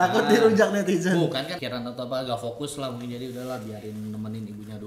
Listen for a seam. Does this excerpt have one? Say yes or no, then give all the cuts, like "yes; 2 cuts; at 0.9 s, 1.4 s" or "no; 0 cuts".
yes; 1 cut; at 1.6 s